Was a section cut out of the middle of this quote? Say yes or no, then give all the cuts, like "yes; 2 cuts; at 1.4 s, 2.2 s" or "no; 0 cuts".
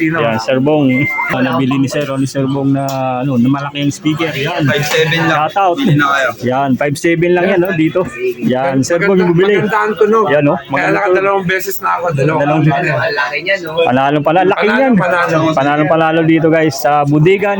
yes; 1 cut; at 1.3 s